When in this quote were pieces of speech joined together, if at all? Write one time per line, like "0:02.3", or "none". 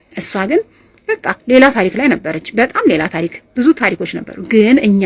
none